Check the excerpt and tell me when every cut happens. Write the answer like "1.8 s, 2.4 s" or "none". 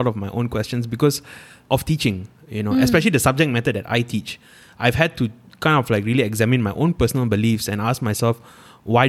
1.6 s